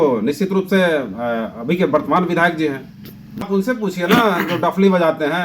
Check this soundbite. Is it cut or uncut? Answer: cut